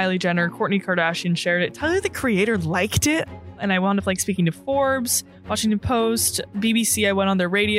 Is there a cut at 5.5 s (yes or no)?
no